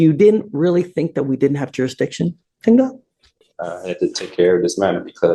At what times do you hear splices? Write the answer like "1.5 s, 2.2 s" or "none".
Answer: none